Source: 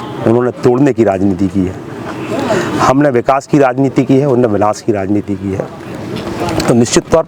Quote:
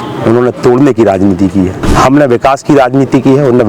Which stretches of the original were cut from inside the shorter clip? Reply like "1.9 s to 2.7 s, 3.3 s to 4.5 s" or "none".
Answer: 1.8 s to 2.7 s